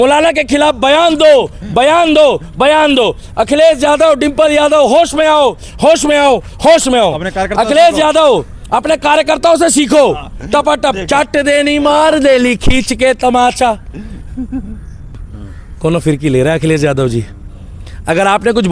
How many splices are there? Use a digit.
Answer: 1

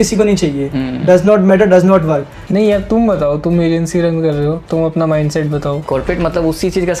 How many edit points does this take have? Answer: 2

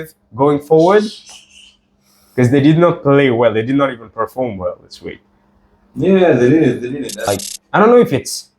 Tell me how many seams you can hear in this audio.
1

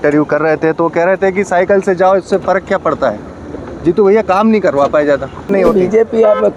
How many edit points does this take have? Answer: 1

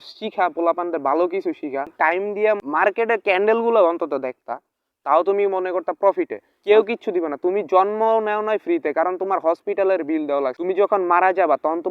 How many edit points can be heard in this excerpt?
2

